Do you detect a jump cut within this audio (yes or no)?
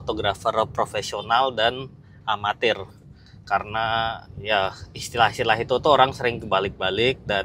no